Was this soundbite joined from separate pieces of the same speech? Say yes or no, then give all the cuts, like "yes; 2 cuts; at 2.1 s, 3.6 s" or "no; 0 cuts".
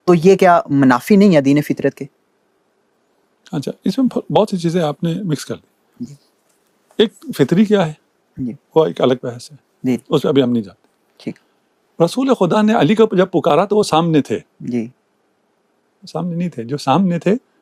no; 0 cuts